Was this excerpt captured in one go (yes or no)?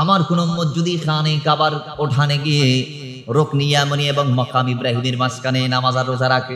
yes